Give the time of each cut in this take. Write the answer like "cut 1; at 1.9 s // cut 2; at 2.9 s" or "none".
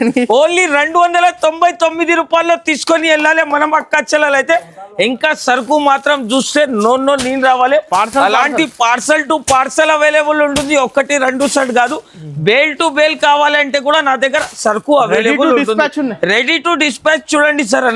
none